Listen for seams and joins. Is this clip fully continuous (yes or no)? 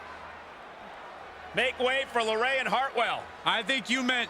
no